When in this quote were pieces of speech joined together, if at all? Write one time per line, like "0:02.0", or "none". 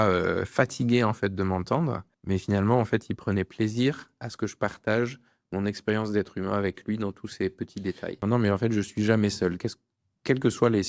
0:02.1
0:08.2